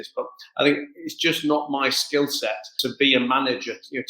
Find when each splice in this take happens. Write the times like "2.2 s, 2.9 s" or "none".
2.8 s